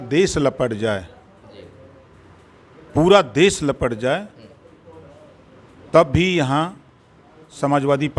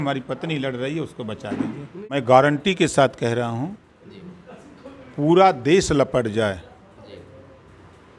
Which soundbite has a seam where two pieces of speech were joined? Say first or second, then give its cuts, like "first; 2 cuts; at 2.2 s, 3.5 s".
second; 1 cut; at 2.1 s